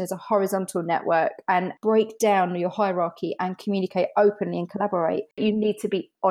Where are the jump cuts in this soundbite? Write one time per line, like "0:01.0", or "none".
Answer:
0:01.7
0:05.4

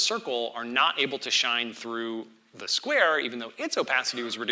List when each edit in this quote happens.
none

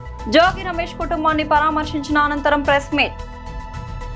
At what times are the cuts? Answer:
none

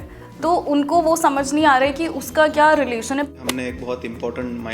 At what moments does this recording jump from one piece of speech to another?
0:03.3

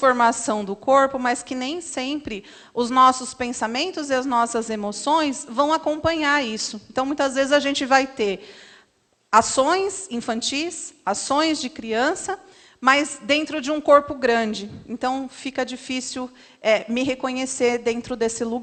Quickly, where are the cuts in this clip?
none

